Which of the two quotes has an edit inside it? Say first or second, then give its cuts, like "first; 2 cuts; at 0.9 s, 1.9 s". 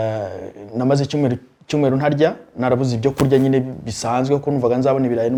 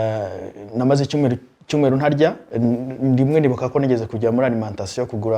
second; 1 cut; at 2.4 s